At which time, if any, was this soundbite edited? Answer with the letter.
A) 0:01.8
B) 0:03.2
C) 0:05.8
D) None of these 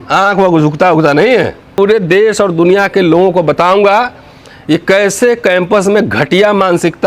A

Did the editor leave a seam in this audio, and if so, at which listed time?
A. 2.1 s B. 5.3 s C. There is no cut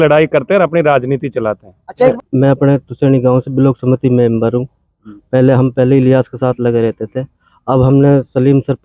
A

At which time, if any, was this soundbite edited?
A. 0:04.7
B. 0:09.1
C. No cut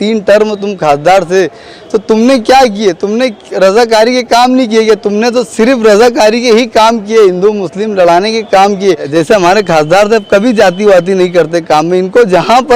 B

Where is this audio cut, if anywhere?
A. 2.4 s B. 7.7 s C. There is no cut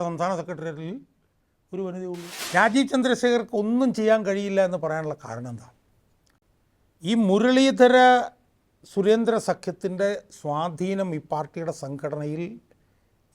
A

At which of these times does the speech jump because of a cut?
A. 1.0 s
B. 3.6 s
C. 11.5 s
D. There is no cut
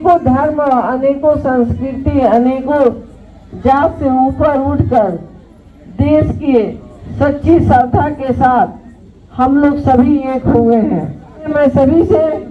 C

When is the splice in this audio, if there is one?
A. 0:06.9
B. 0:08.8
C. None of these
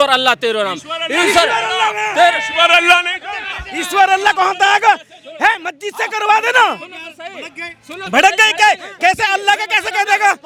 C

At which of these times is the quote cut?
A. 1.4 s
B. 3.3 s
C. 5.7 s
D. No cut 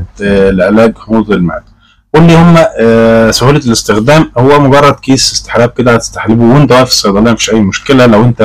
D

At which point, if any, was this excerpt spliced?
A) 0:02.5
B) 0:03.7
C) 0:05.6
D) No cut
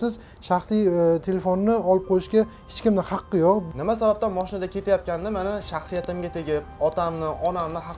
B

